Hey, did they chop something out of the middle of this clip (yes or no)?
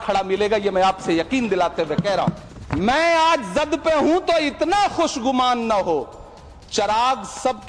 yes